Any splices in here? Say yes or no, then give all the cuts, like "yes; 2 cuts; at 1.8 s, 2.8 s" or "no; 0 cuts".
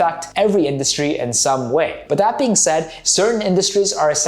yes; 2 cuts; at 2.0 s, 2.9 s